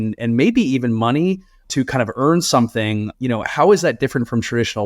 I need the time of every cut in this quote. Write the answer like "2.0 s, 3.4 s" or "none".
1.6 s, 3.1 s